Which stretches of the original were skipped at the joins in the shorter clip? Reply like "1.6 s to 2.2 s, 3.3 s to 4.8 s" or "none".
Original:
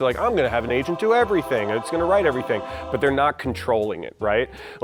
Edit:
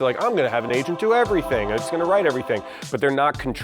none